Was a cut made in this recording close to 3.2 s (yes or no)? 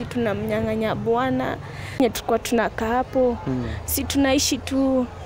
no